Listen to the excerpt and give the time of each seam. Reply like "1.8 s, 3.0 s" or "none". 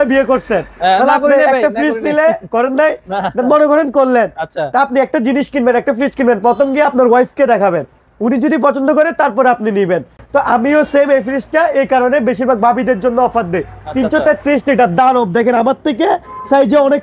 none